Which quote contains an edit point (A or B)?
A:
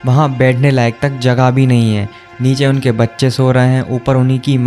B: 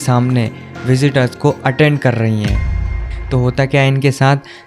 B